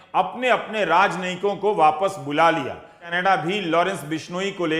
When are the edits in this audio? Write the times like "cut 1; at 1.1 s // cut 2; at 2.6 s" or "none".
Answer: cut 1; at 3.0 s